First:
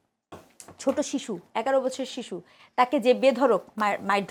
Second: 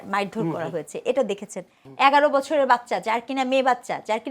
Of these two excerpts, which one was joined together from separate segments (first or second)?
second